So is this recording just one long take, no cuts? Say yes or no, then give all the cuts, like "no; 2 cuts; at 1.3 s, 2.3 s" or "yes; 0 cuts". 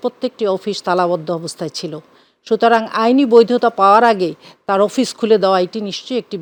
yes; 0 cuts